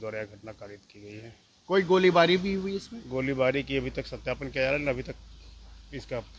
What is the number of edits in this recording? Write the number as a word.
zero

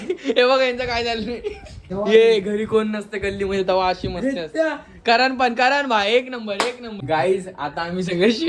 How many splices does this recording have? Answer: two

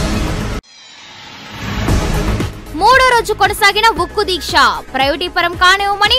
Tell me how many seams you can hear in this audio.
one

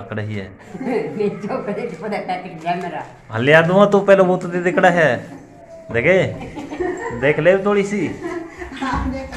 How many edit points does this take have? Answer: zero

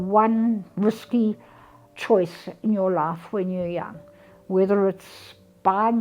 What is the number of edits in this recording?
zero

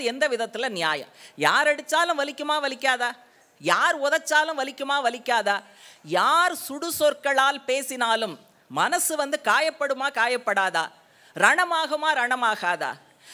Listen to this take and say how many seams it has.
zero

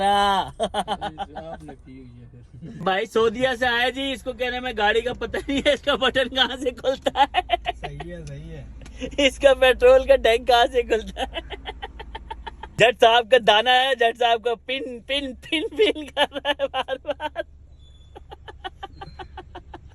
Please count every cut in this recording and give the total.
two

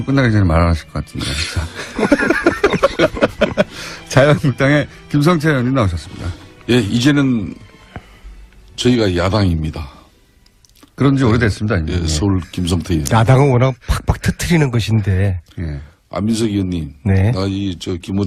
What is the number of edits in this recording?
zero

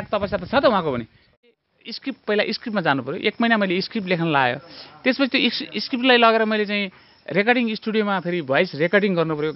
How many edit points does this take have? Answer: one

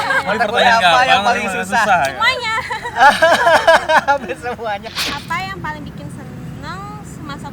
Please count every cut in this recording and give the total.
one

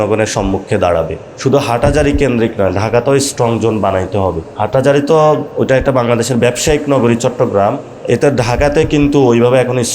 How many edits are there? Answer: four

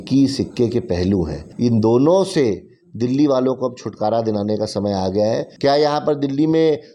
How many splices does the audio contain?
two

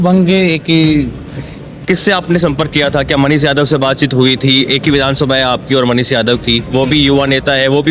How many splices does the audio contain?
one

